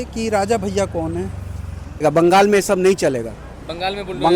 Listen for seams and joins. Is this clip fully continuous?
no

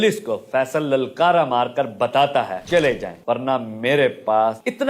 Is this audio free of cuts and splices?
no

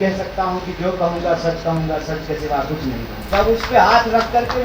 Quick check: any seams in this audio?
yes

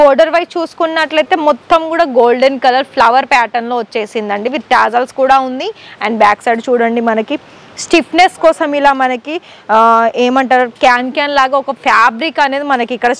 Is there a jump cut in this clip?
no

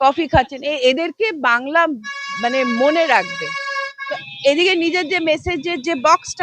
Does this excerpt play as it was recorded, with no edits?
no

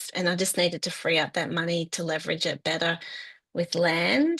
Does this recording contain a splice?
no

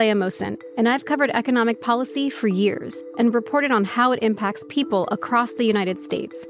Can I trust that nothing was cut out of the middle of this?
no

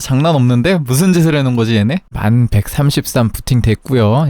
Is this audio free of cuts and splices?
no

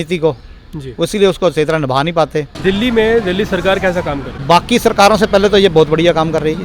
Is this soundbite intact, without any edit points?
no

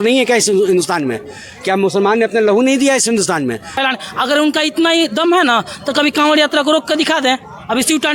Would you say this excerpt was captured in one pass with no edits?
no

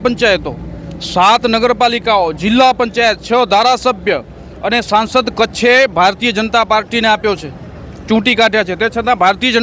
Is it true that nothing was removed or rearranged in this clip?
yes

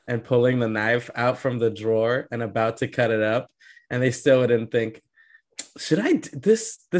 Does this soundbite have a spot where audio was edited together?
no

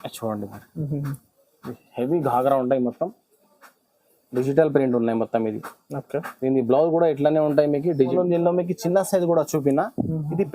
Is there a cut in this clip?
yes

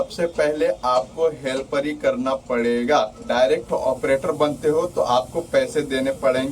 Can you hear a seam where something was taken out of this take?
yes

